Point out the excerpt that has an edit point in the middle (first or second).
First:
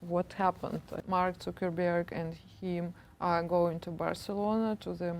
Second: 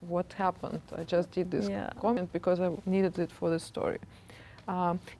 first